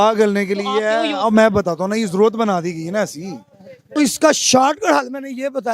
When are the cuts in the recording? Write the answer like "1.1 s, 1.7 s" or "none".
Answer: 3.9 s